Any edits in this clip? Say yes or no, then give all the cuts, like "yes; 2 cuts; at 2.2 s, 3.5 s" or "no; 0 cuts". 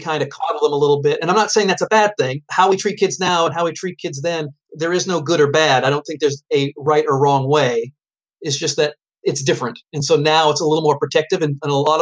yes; 2 cuts; at 2.4 s, 4.6 s